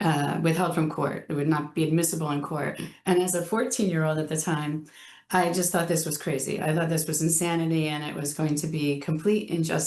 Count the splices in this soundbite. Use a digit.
0